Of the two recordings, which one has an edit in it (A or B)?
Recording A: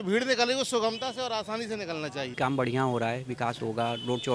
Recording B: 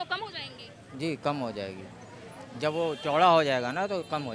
A